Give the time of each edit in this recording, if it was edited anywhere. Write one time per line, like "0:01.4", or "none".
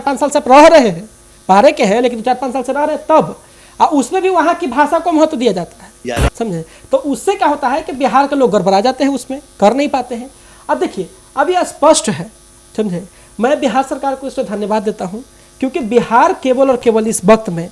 none